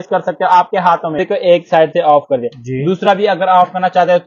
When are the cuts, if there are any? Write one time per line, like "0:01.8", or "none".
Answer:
0:01.2